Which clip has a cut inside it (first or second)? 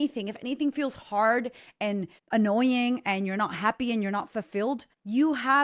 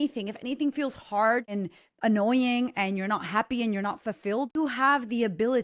second